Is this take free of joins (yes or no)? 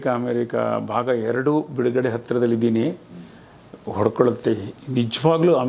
yes